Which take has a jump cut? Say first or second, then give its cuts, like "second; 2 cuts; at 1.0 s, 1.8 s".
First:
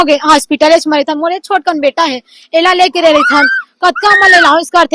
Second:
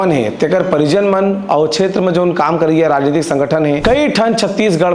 second; 1 cut; at 3.8 s